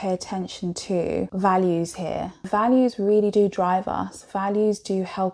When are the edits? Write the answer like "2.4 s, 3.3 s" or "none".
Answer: 1.3 s, 2.5 s